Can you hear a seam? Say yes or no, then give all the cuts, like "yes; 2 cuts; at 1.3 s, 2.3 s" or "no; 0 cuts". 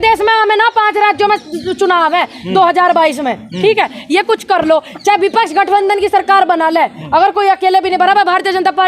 no; 0 cuts